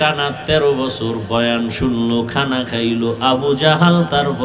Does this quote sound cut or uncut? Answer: uncut